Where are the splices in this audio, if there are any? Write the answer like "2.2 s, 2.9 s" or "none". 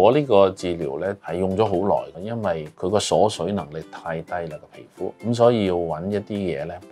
1.2 s, 2.7 s, 5.2 s